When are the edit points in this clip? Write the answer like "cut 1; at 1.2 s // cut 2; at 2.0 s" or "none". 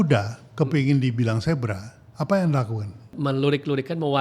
cut 1; at 3.1 s